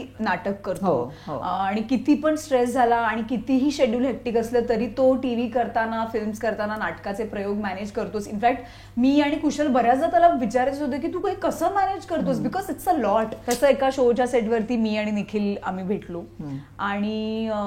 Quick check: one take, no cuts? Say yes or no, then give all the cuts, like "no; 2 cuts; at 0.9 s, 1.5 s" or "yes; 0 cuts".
no; 1 cut; at 13.4 s